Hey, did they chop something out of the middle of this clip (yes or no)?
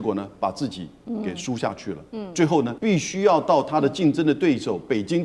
yes